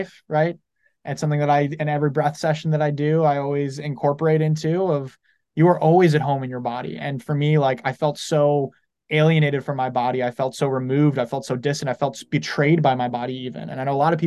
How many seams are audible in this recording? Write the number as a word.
zero